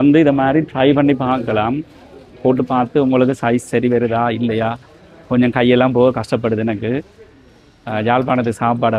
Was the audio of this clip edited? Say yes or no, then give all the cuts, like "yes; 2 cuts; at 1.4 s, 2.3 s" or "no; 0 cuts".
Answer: no; 0 cuts